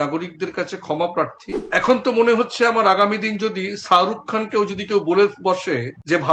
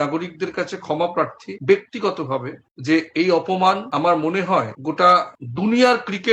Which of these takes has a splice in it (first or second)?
first